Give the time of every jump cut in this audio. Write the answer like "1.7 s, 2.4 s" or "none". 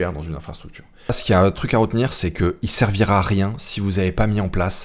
none